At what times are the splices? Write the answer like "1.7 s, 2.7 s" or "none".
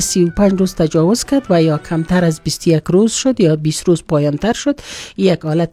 none